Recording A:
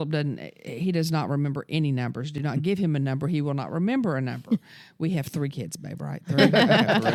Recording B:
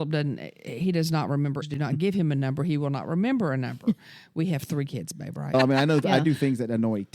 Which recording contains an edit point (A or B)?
B